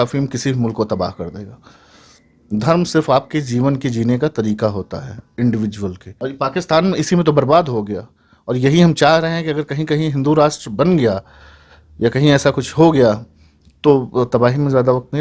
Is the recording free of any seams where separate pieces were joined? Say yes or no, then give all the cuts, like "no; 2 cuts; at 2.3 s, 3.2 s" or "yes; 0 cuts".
no; 1 cut; at 6.1 s